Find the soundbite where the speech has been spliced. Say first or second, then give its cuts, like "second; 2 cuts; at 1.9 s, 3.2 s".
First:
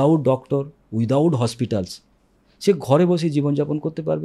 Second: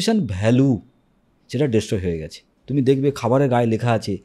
second; 1 cut; at 2.5 s